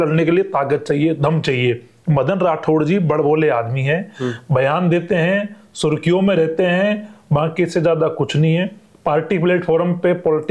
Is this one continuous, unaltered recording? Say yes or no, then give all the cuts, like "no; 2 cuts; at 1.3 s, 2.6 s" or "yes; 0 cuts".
yes; 0 cuts